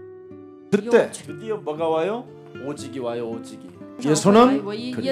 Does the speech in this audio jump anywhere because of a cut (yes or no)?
no